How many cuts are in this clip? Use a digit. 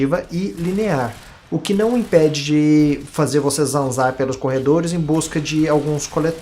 1